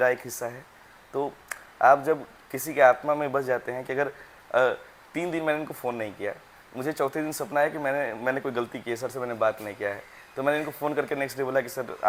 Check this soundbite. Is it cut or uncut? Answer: uncut